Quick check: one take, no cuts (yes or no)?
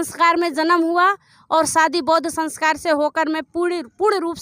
yes